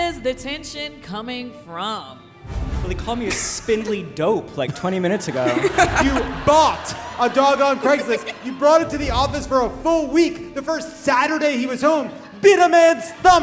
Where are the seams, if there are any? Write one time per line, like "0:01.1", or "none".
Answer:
0:02.6
0:06.0